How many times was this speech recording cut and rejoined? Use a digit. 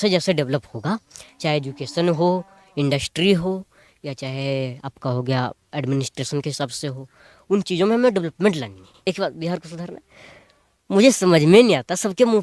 1